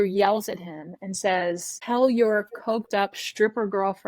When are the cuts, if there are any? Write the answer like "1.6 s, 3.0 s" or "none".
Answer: 1.7 s